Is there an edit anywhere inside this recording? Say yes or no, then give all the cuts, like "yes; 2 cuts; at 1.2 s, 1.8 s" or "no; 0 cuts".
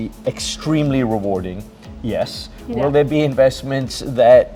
no; 0 cuts